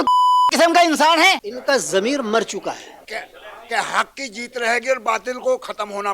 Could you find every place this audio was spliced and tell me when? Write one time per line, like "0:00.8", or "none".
0:01.5
0:03.1